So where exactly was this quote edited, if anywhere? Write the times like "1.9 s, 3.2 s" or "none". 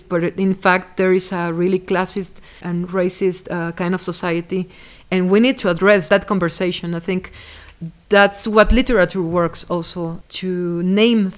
2.6 s, 6.1 s, 10.2 s